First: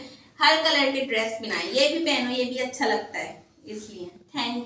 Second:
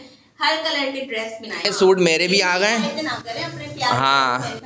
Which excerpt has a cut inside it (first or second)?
second